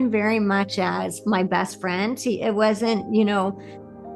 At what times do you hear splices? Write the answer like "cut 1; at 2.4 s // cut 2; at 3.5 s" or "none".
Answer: none